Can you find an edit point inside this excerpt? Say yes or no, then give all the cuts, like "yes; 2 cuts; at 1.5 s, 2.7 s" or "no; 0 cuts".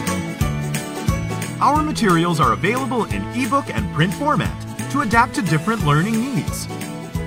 no; 0 cuts